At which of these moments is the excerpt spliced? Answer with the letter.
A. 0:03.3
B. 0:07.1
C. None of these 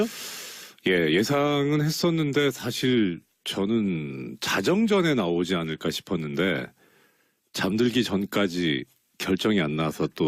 C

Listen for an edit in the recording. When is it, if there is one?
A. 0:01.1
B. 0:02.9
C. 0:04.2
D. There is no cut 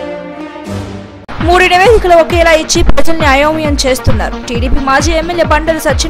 D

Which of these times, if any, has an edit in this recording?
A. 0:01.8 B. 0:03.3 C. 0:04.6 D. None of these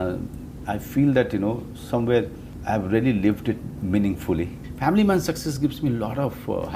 C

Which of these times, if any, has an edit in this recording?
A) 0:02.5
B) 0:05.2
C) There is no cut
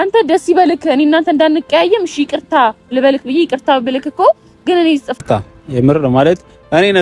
B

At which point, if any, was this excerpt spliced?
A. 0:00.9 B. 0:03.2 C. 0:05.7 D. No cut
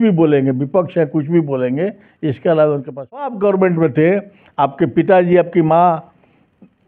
B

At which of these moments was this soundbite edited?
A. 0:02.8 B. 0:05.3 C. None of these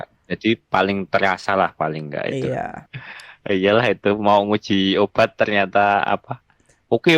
A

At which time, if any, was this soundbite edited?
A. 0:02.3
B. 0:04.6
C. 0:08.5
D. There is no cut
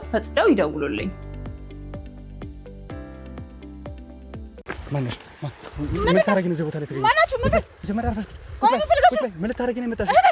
B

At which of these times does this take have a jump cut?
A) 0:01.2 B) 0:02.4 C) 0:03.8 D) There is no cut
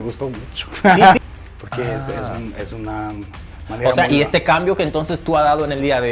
A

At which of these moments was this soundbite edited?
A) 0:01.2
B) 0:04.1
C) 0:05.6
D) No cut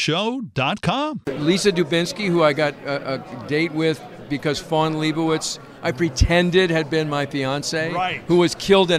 A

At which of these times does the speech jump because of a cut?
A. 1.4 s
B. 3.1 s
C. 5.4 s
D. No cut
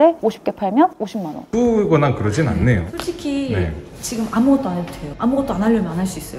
A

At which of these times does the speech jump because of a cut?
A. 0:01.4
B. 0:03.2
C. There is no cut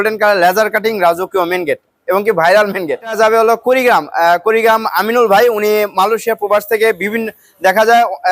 B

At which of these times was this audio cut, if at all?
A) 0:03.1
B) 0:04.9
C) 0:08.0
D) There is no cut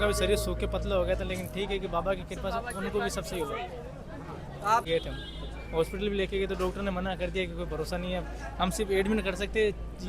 B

